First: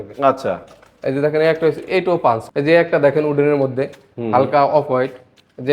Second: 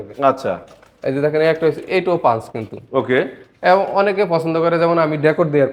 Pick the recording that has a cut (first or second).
first